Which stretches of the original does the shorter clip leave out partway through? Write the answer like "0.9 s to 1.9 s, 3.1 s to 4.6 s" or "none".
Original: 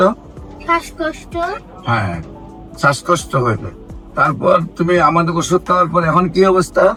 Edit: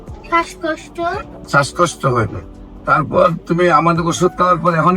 1.7 s to 2.6 s